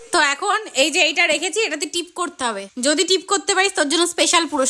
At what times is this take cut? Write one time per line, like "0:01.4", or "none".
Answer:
0:02.7